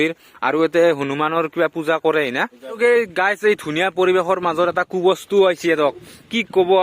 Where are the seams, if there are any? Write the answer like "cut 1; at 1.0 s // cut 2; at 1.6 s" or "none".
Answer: cut 1; at 2.6 s